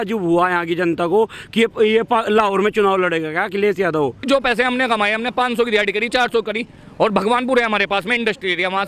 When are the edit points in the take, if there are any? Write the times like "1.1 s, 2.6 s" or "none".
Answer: 4.3 s